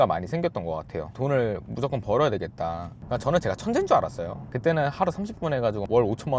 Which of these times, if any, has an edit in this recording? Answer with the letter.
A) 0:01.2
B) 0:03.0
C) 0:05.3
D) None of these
B